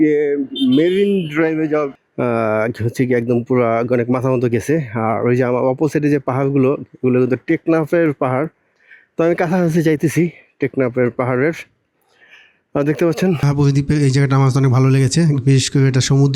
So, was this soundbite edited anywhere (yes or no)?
yes